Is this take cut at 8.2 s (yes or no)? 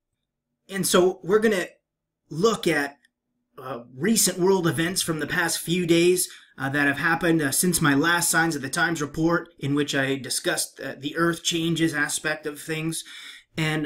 yes